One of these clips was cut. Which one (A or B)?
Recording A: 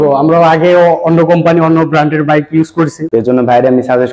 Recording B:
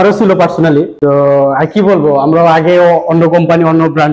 A